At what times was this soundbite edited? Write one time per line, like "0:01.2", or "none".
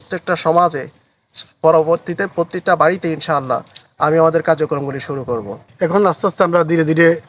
0:05.7